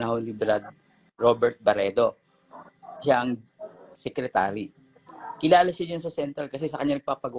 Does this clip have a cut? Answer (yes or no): no